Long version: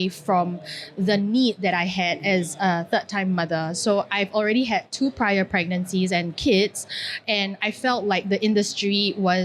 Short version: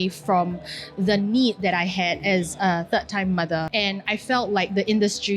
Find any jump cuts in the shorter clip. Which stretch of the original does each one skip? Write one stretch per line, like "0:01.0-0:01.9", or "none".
0:03.7-0:07.2

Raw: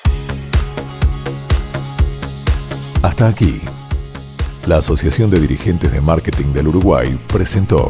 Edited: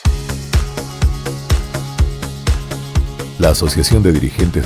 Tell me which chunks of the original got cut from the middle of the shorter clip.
0:02.9-0:04.2

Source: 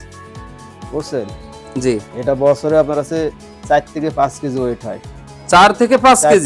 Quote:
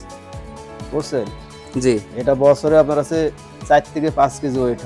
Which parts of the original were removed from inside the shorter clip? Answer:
none

